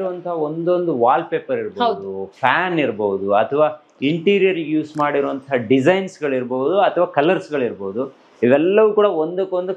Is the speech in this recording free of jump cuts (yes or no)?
yes